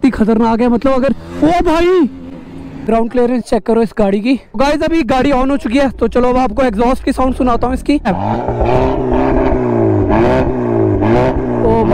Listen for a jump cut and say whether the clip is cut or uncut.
cut